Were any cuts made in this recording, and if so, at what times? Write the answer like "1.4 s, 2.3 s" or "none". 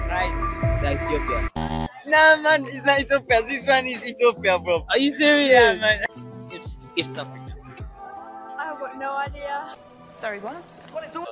1.6 s, 6.0 s